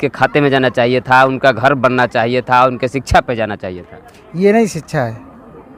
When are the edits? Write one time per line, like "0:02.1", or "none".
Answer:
none